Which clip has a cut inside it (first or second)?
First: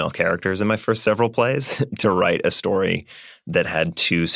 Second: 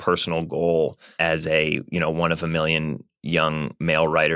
second